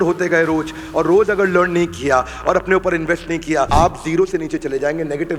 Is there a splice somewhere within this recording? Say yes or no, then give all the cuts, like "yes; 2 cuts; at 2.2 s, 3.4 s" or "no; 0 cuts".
yes; 1 cut; at 3.7 s